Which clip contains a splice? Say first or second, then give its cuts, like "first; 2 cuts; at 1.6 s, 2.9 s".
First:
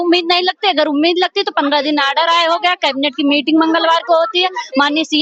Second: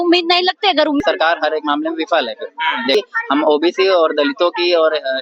second; 2 cuts; at 1.0 s, 2.9 s